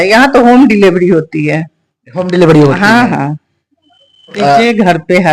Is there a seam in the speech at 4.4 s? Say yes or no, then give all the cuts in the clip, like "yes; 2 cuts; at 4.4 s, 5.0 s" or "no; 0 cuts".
yes; 1 cut; at 4.4 s